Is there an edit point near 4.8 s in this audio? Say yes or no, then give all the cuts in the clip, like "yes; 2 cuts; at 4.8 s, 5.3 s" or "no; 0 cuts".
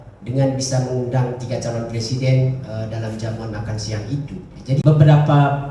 yes; 1 cut; at 4.8 s